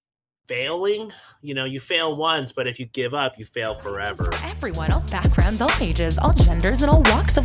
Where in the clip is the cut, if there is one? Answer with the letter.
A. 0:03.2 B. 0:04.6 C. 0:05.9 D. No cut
B